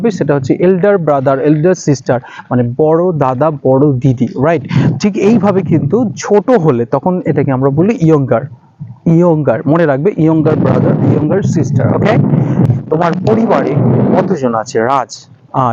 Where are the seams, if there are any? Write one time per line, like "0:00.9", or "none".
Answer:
0:12.7

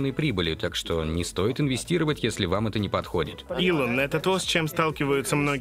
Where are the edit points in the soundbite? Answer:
0:03.4

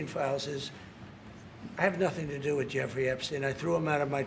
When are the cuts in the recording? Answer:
none

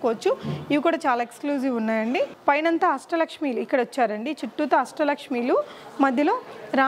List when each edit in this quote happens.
0:02.3

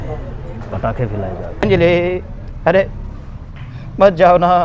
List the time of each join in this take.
0:01.6

